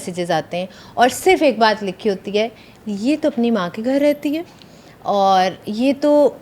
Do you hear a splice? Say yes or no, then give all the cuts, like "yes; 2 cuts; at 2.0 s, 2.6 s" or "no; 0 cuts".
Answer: no; 0 cuts